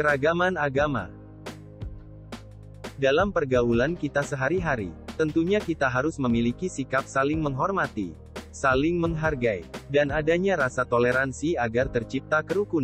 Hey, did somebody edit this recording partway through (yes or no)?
yes